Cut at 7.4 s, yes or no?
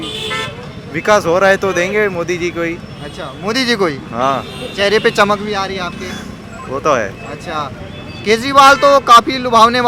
no